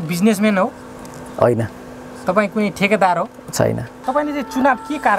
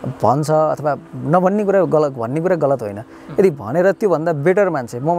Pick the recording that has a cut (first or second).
first